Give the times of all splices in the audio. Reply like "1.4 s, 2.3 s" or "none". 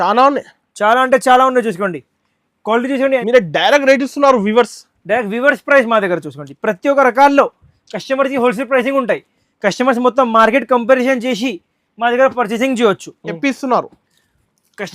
3.2 s, 13.4 s